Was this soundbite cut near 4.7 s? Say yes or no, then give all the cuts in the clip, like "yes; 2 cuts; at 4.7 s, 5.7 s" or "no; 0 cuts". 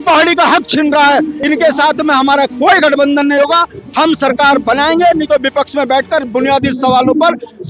no; 1 cut; at 1.4 s